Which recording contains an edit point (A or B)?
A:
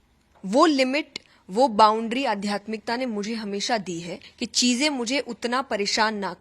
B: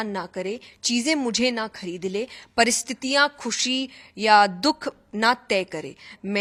A